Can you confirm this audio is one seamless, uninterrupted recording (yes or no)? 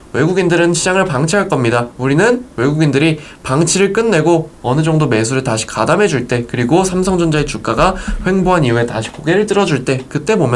yes